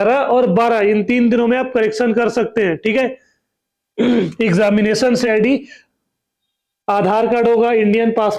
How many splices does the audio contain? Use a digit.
1